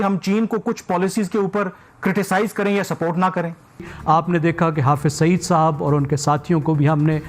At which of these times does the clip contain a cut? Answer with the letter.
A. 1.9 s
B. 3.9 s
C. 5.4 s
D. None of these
B